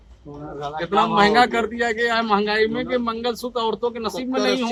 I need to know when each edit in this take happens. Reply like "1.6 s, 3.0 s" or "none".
none